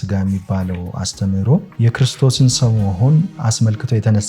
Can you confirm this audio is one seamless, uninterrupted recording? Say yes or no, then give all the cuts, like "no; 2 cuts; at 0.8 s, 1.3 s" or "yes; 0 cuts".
no; 1 cut; at 1.7 s